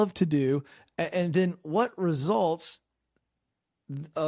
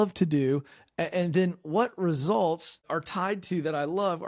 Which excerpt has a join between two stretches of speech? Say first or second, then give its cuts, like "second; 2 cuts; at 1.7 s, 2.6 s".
second; 1 cut; at 2.8 s